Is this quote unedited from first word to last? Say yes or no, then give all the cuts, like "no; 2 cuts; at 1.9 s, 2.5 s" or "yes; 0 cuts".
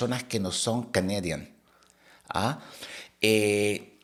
yes; 0 cuts